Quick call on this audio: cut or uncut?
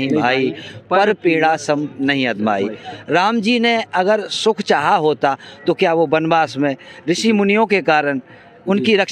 uncut